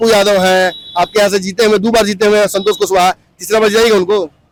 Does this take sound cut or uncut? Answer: uncut